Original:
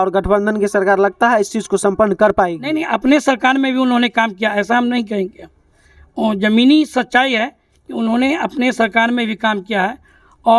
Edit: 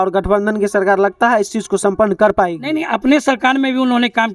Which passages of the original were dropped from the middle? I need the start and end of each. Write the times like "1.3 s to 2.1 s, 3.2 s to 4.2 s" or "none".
none